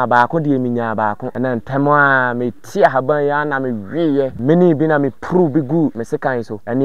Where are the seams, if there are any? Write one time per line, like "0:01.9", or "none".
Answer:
0:01.3
0:04.4
0:06.0